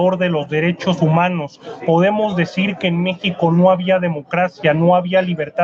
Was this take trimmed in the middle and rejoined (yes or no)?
no